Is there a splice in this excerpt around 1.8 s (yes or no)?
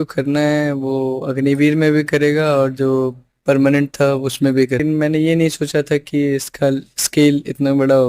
no